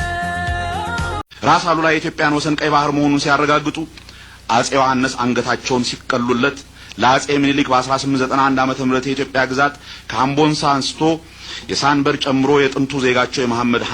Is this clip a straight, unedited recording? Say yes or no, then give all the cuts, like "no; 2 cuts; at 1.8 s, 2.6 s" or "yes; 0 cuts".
no; 1 cut; at 1.2 s